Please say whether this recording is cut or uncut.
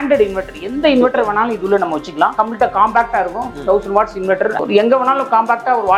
cut